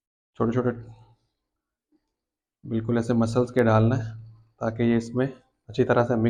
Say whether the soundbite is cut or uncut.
uncut